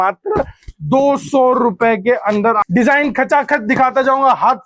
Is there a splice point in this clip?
yes; 1 cut; at 2.6 s

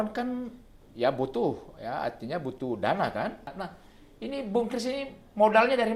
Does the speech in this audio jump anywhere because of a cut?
yes; 1 cut; at 3.5 s

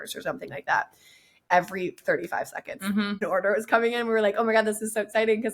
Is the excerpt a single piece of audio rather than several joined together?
no; 2 cuts; at 1.4 s, 3.2 s

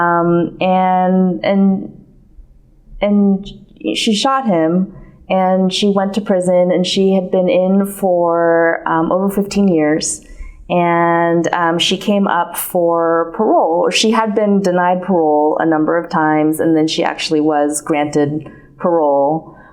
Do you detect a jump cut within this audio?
no; 0 cuts

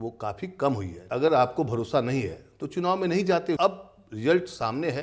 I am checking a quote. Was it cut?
yes; 2 cuts; at 1.0 s, 3.6 s

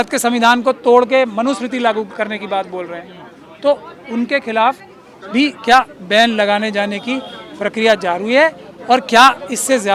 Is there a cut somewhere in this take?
no; 0 cuts

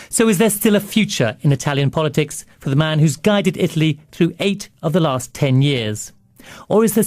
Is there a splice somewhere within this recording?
yes; 1 cut; at 1.9 s

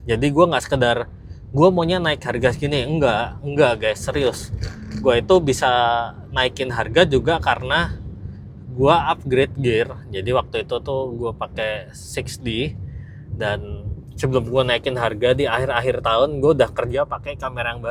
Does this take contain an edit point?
no; 0 cuts

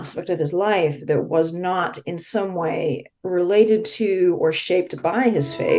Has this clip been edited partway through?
no; 0 cuts

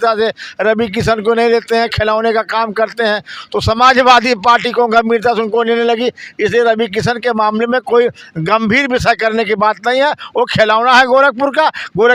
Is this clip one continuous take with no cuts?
yes; 0 cuts

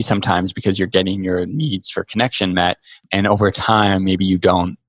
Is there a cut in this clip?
yes; 1 cut; at 2.9 s

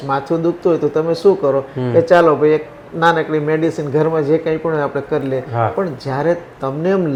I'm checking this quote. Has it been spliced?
no; 0 cuts

